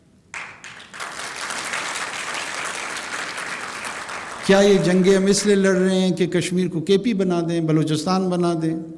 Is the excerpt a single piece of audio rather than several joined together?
yes; 0 cuts

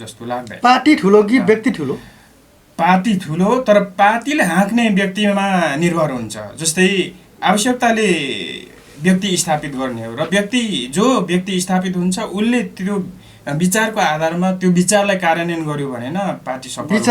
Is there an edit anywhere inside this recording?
no; 0 cuts

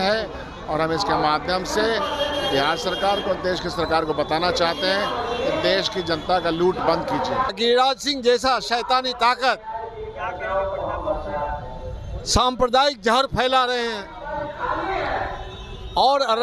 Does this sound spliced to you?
yes; 1 cut; at 7.5 s

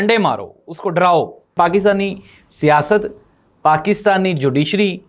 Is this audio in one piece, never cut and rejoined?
no; 1 cut; at 1.5 s

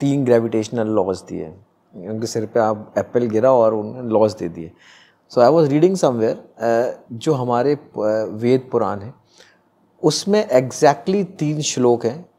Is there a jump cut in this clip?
no; 0 cuts

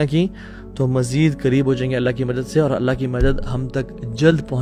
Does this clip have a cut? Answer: no; 0 cuts

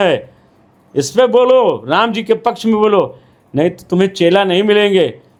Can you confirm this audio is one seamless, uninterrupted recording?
yes; 0 cuts

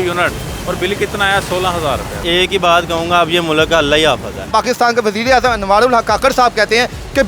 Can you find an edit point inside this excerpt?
yes; 2 cuts; at 2.2 s, 4.5 s

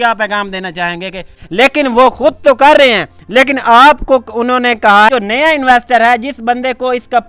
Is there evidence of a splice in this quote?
yes; 2 cuts; at 1.4 s, 5.1 s

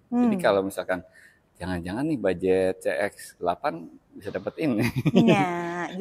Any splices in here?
no; 0 cuts

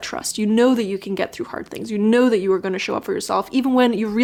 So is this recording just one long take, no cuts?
yes; 0 cuts

